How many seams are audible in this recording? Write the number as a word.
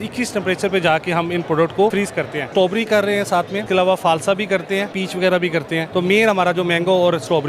four